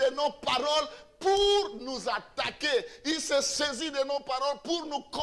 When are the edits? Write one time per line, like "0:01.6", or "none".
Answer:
none

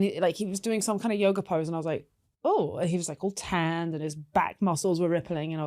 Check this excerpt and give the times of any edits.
none

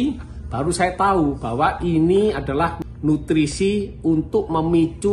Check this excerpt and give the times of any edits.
0:02.8

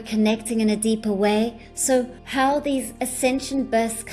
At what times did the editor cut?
0:01.9
0:02.9

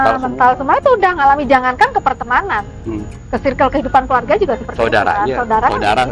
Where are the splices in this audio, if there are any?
none

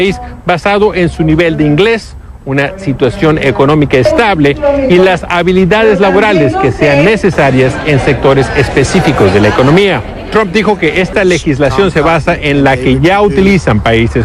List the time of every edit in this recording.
0:02.0

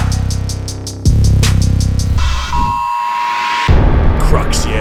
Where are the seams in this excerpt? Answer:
none

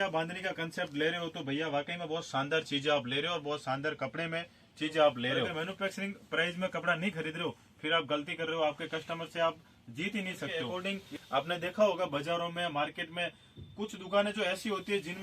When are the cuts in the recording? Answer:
0:05.6
0:10.6

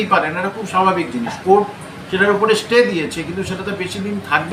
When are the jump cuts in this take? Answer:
none

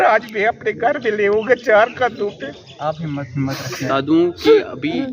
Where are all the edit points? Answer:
0:03.9

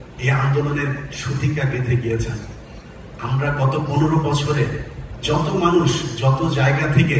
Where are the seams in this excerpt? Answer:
none

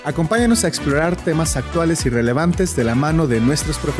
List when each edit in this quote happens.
none

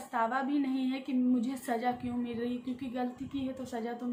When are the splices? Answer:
none

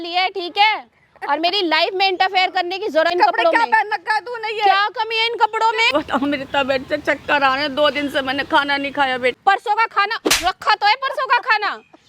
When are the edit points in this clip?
0:03.1
0:05.9
0:09.3

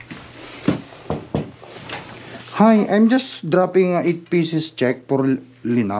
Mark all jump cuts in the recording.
0:01.8

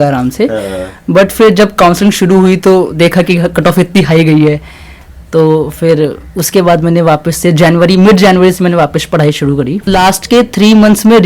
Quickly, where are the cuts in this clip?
0:09.9

